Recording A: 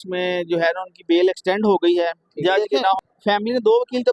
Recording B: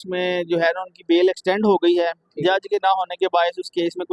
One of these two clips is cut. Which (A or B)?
A